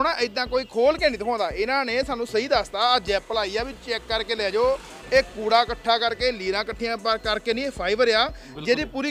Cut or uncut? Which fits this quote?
uncut